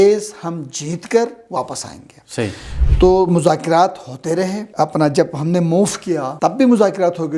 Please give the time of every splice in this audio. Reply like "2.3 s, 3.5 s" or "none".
4.6 s, 6.3 s